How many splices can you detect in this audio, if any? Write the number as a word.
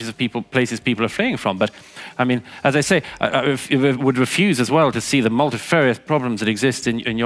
zero